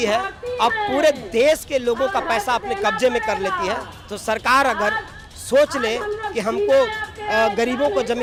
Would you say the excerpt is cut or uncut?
uncut